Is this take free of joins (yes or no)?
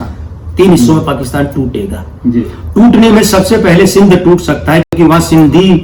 yes